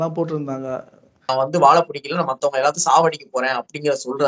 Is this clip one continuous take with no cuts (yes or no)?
no